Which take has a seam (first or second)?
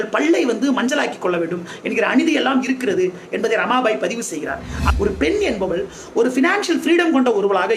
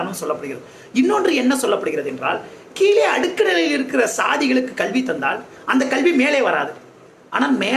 first